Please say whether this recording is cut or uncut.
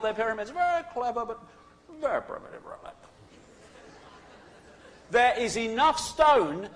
uncut